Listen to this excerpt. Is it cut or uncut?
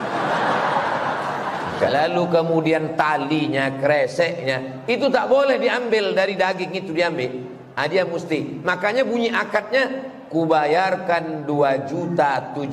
cut